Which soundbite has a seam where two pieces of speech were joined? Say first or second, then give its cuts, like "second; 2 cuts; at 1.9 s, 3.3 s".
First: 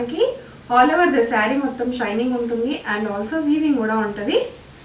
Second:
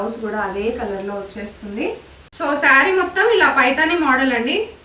second; 1 cut; at 2.6 s